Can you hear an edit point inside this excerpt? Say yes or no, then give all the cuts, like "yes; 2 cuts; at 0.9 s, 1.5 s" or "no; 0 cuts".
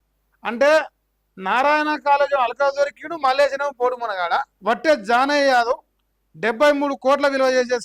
yes; 1 cut; at 4.5 s